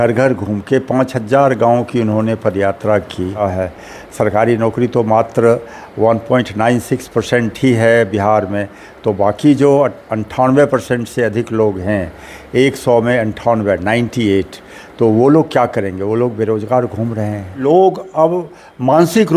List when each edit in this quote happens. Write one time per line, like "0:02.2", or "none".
0:03.4
0:17.6